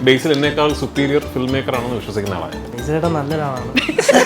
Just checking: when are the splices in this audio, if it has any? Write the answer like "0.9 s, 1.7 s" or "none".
2.7 s